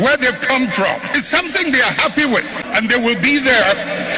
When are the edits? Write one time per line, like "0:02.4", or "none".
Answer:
0:01.1
0:02.6